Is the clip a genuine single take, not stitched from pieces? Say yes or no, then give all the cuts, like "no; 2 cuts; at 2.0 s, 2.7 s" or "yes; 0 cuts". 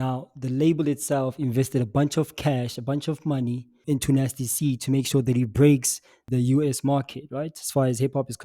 no; 2 cuts; at 3.8 s, 6.3 s